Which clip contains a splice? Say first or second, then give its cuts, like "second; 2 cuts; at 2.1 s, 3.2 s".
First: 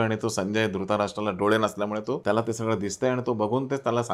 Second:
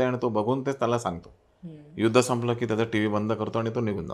first; 1 cut; at 2.1 s